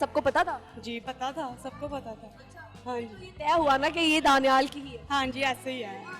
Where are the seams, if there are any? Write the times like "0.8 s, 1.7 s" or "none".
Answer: none